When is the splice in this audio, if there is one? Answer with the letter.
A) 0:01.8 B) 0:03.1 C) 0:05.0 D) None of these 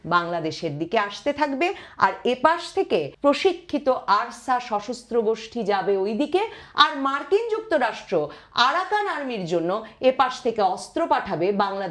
B